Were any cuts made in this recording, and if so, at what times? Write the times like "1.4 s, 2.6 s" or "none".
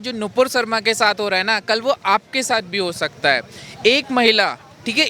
none